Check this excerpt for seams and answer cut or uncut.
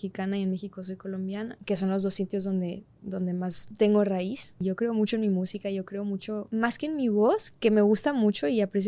cut